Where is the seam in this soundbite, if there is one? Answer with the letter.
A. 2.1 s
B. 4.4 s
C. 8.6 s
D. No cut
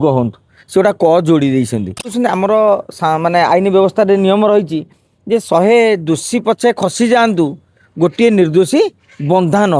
A